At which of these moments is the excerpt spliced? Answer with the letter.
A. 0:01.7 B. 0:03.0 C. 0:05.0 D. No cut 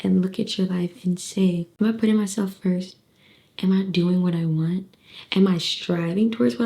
A